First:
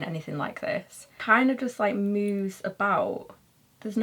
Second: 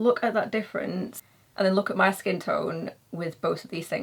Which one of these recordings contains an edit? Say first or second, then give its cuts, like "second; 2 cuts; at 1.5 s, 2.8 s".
first; 1 cut; at 1.2 s